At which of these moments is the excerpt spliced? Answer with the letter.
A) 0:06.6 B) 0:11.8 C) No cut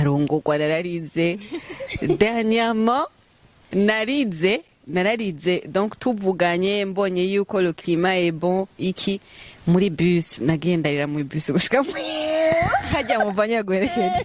C